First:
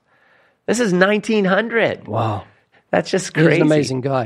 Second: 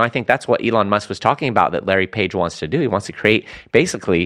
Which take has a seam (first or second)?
first